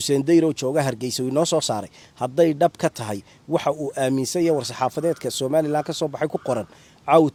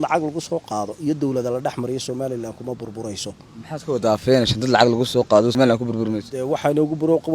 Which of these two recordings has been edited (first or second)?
second